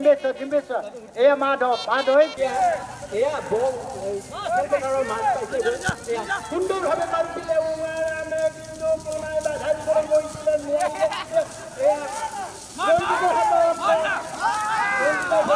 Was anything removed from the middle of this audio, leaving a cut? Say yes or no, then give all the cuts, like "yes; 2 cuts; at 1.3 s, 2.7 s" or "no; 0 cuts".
yes; 1 cut; at 2.3 s